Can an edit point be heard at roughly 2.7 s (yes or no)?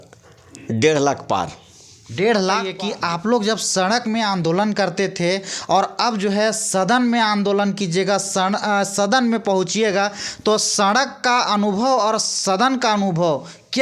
yes